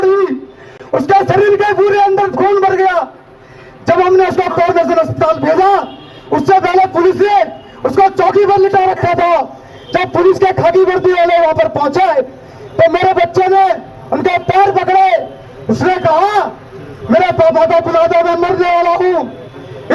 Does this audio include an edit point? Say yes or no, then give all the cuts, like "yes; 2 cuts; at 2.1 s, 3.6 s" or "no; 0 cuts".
no; 0 cuts